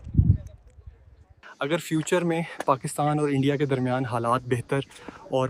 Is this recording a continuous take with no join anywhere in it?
no; 1 cut; at 1.4 s

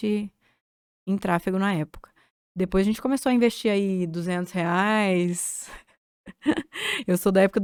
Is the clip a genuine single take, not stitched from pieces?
yes; 0 cuts

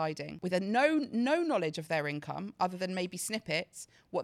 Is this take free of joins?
yes; 0 cuts

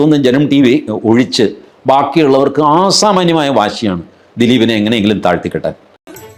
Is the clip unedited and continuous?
yes; 0 cuts

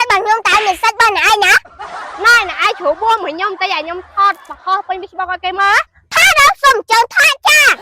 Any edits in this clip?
no; 0 cuts

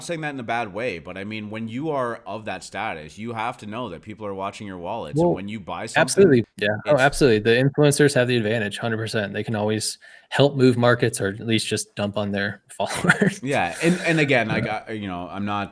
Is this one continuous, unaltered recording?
no; 1 cut; at 6.4 s

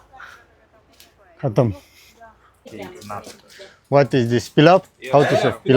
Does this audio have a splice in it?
yes; 1 cut; at 2.6 s

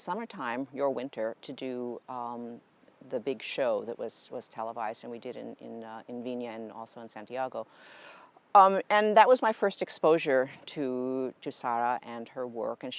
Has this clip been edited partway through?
yes; 1 cut; at 7.8 s

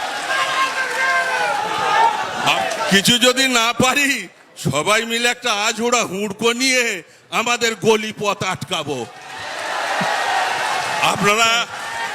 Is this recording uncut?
no; 1 cut; at 2.6 s

